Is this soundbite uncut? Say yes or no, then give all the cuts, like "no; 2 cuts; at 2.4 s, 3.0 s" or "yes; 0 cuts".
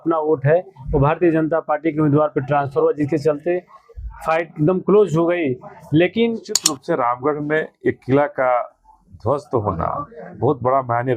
no; 1 cut; at 6.7 s